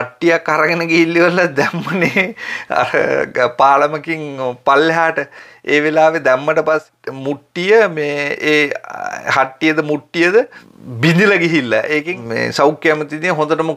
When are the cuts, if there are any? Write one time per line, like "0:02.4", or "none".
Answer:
none